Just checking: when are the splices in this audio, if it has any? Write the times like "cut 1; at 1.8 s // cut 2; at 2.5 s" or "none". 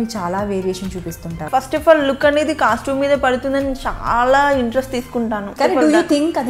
cut 1; at 1.5 s // cut 2; at 5.5 s